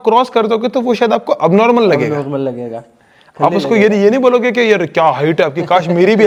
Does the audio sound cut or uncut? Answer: uncut